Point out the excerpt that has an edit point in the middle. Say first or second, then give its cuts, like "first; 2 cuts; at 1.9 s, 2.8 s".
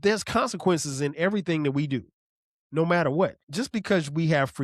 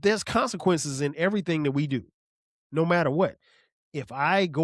first; 1 cut; at 3.4 s